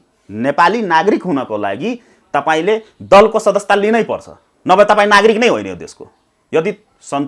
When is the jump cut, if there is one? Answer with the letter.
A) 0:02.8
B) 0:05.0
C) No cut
C